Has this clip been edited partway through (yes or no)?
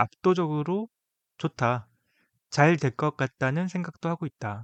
no